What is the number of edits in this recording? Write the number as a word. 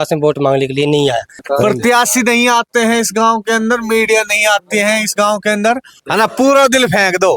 two